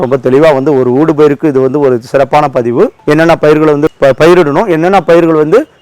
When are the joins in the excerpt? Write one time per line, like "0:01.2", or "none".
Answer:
0:03.9

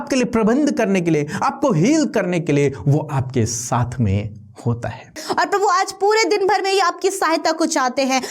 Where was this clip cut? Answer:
0:05.2

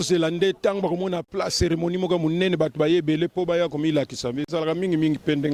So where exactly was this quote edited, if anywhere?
none

